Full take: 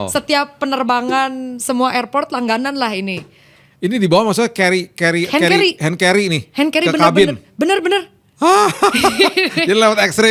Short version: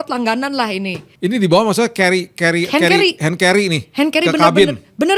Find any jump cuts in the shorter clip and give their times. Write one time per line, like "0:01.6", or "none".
0:01.0